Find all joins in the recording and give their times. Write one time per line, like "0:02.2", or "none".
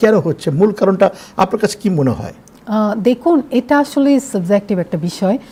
none